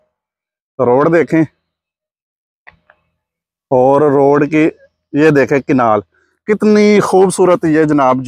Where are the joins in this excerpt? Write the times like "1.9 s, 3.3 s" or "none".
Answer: none

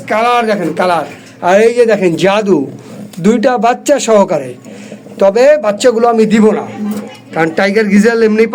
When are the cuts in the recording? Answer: none

